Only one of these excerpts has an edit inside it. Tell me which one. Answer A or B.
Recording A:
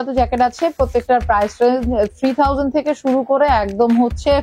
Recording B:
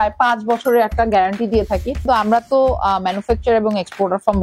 B